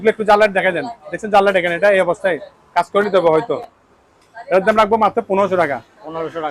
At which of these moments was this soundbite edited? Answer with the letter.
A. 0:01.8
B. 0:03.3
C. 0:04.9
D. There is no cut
D